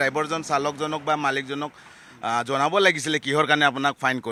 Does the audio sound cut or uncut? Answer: uncut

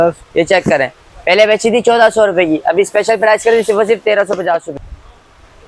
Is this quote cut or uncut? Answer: cut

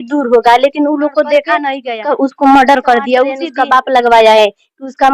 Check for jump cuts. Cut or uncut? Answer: cut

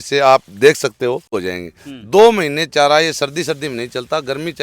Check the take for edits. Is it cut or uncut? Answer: cut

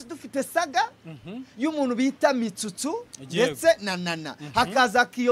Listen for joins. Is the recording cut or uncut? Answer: uncut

